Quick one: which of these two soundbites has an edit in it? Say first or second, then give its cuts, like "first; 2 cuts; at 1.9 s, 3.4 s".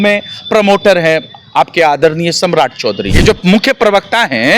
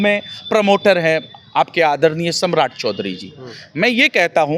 first; 1 cut; at 3.1 s